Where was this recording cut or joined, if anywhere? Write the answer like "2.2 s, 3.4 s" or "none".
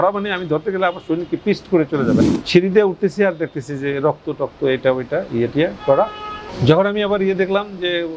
2.2 s